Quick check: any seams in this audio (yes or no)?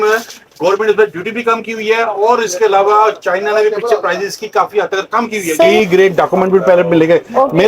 yes